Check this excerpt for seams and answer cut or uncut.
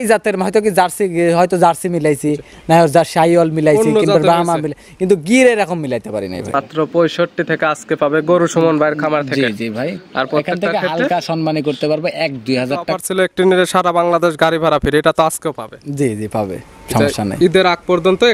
cut